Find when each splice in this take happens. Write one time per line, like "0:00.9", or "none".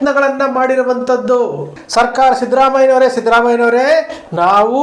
0:01.8